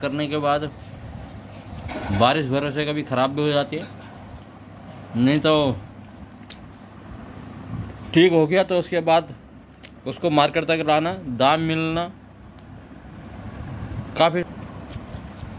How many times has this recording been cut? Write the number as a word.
one